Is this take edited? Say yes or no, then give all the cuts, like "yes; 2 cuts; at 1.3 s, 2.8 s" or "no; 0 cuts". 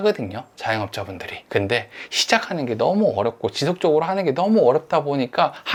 no; 0 cuts